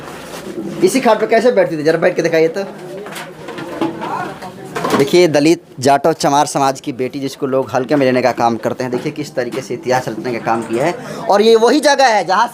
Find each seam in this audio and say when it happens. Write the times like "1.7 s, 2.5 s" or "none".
none